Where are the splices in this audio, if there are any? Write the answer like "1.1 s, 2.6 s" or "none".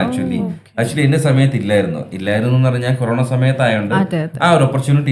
none